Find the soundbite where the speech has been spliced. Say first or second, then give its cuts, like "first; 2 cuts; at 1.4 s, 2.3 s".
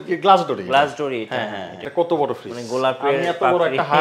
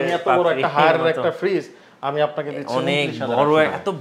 first; 1 cut; at 1.8 s